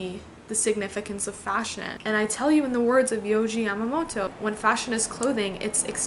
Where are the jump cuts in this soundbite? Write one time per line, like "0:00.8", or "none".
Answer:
0:04.3